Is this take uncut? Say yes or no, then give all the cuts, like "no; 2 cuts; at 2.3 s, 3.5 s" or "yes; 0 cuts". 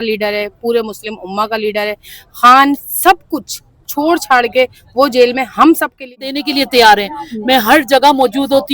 no; 1 cut; at 6.1 s